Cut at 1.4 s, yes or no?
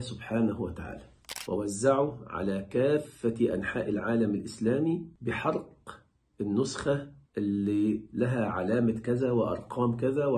yes